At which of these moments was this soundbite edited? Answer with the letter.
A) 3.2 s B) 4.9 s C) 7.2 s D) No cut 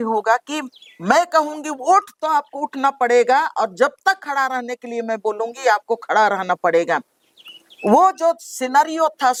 D